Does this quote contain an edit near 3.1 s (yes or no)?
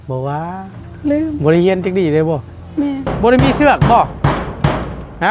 yes